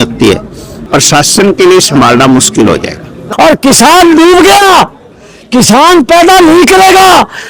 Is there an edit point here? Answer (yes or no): yes